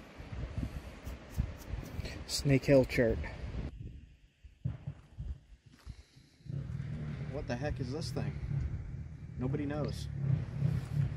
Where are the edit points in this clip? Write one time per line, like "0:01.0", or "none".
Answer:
0:03.7